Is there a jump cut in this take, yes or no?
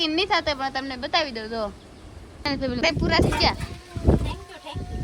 yes